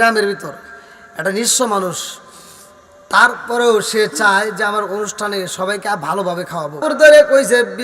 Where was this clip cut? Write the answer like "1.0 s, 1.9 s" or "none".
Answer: 6.8 s